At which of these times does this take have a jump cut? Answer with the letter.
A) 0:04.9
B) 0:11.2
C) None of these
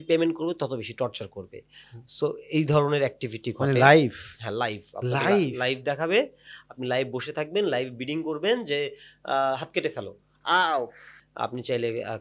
B